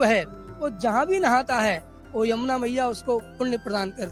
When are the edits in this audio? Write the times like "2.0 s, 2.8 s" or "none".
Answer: none